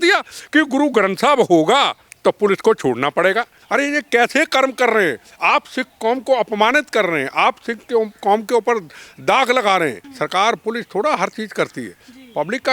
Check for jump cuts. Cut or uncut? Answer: cut